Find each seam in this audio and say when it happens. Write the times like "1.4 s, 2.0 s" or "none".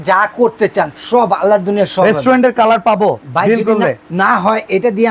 none